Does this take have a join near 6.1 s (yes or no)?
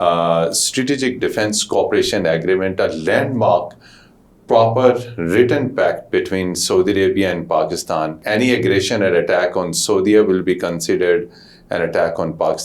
no